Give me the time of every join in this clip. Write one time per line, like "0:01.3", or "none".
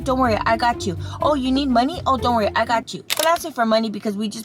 0:03.0